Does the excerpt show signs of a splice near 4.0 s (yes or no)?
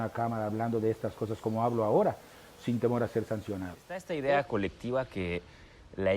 yes